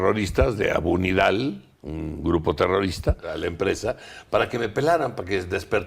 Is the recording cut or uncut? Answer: cut